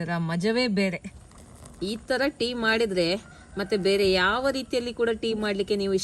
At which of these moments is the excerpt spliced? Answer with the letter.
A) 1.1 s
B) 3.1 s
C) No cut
A